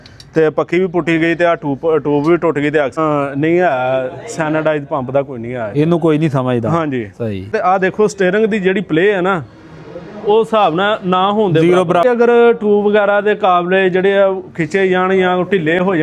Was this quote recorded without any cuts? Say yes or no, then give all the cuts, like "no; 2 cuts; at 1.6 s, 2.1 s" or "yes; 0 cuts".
no; 3 cuts; at 3.0 s, 7.5 s, 12.0 s